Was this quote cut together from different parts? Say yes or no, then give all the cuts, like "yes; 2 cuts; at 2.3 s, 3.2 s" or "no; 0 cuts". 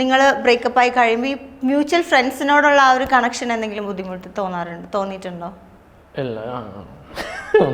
no; 0 cuts